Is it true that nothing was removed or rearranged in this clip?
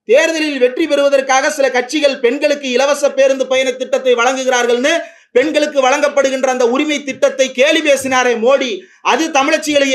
yes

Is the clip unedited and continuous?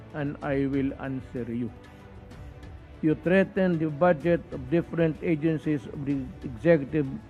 yes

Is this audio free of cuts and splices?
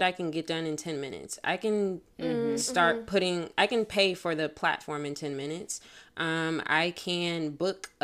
yes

